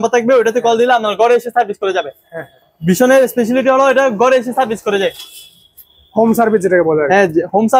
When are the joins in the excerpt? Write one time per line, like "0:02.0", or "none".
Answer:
none